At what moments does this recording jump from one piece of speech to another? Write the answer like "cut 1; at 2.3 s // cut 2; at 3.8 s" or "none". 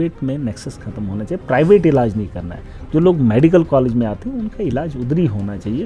none